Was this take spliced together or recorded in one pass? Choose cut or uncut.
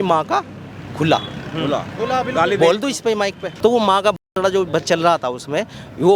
cut